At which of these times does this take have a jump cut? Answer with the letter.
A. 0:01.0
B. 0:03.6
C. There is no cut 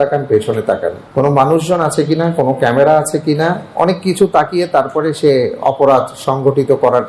A